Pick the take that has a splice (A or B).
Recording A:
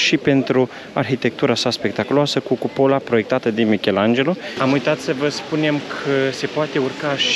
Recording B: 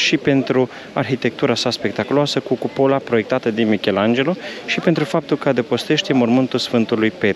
A